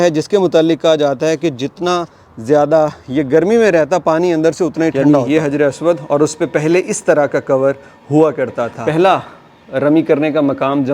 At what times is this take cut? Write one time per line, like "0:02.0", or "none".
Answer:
0:04.9
0:08.7